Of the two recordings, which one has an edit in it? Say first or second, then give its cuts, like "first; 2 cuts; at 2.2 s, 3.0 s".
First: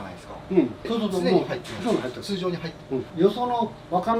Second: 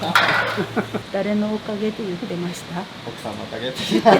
second; 1 cut; at 1.0 s